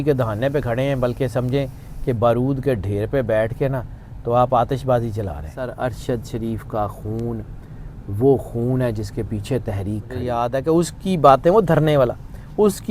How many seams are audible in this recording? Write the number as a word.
two